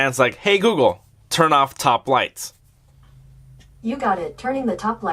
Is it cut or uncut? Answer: uncut